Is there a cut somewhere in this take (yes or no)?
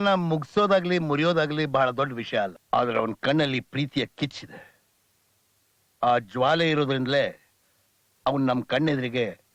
yes